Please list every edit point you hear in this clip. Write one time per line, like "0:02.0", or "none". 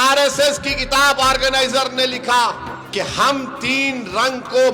0:02.7